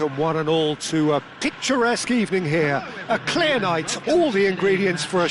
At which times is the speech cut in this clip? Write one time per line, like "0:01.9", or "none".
none